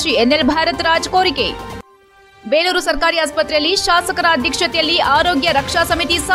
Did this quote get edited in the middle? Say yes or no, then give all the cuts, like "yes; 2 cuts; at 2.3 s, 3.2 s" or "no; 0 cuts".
no; 0 cuts